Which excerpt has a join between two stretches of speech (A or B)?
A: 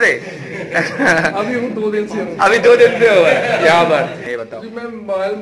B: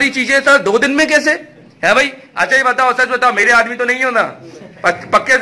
A